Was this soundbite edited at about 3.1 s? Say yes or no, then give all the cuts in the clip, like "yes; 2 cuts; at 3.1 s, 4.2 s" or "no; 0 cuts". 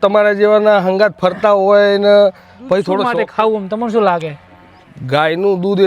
yes; 1 cut; at 3.1 s